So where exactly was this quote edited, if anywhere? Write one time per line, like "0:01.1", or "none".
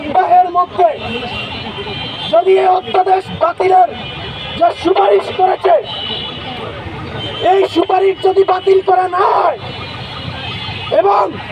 none